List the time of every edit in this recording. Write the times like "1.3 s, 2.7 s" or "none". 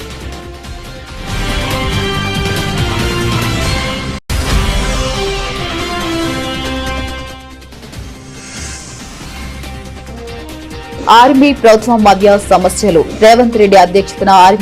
none